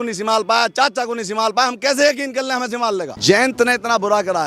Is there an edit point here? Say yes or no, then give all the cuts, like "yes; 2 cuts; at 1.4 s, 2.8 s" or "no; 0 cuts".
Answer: yes; 1 cut; at 3.1 s